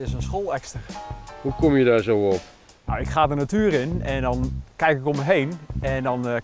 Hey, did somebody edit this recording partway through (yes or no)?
no